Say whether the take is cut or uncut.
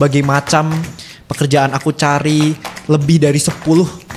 uncut